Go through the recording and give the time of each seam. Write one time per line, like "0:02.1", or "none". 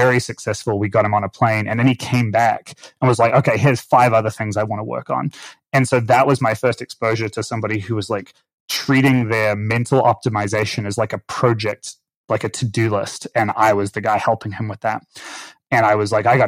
none

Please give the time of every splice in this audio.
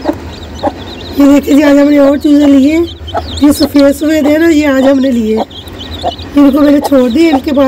0:06.1

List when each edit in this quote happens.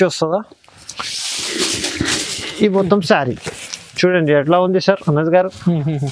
none

